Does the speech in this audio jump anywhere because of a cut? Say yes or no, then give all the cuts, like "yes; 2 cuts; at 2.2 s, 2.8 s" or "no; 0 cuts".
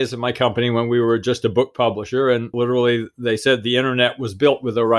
yes; 1 cut; at 2.5 s